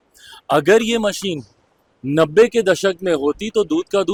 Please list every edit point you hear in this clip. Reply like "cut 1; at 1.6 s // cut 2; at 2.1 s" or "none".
none